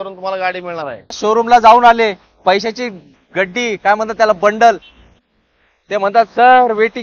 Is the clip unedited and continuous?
no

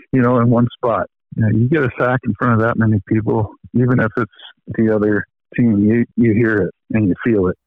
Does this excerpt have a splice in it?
yes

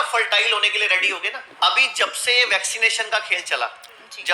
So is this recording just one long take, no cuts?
no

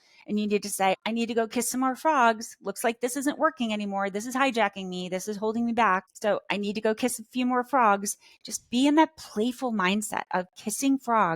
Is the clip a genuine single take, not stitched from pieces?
no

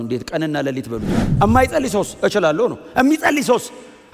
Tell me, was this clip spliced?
yes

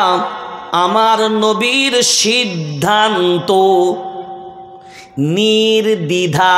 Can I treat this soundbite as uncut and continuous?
yes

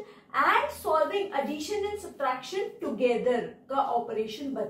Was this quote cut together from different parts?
no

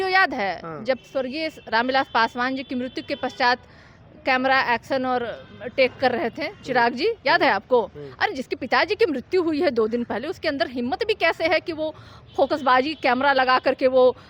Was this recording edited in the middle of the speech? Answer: no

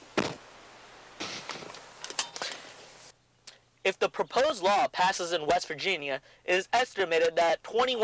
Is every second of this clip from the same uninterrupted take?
yes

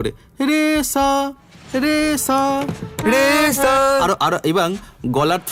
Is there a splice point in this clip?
no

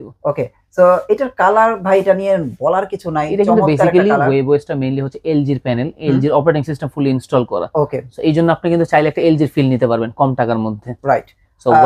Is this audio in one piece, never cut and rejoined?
yes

